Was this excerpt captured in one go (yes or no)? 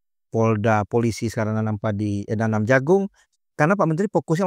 no